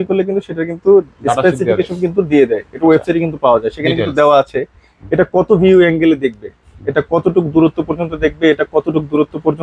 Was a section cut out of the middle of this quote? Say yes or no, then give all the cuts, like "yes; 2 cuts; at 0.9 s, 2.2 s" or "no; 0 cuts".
no; 0 cuts